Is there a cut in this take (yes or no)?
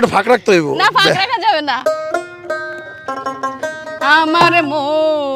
no